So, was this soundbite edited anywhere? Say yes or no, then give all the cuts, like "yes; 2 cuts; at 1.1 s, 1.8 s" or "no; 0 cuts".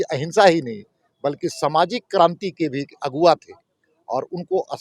no; 0 cuts